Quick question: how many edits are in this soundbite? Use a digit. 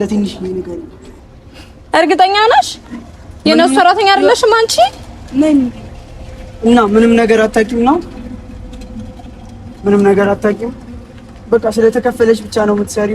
1